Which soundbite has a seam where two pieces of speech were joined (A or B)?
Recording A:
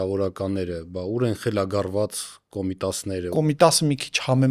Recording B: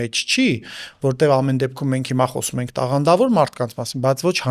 A